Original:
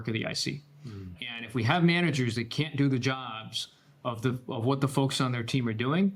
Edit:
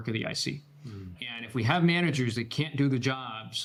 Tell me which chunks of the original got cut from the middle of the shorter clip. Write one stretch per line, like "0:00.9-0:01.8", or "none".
none